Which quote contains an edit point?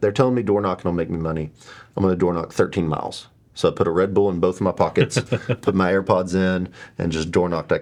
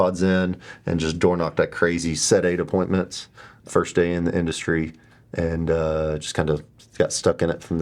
second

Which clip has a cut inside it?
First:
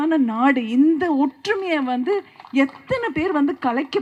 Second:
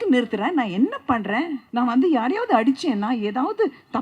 second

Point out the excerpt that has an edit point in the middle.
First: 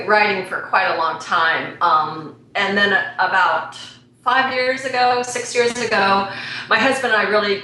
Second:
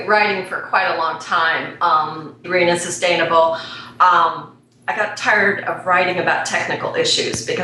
first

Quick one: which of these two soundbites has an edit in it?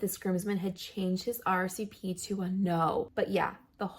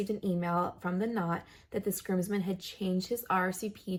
first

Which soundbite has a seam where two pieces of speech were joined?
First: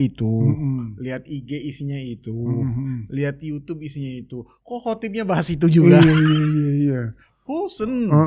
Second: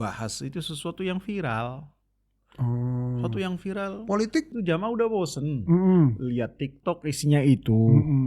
second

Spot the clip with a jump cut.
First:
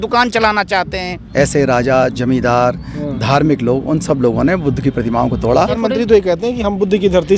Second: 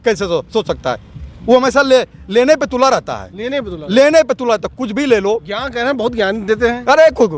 first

